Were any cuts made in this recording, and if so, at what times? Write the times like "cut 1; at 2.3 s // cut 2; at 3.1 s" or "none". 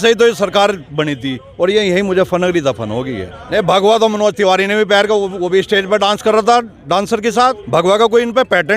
cut 1; at 3.4 s // cut 2; at 7.6 s

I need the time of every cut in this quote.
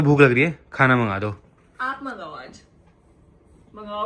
none

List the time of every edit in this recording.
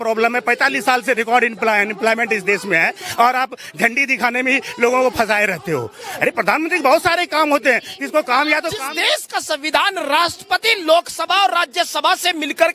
cut 1; at 8.9 s

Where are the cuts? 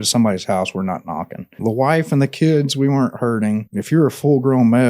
cut 1; at 1.4 s // cut 2; at 3.7 s

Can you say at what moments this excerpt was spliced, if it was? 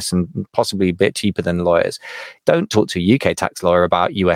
cut 1; at 2.3 s

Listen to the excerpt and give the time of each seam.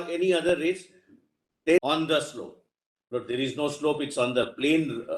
cut 1; at 1.8 s

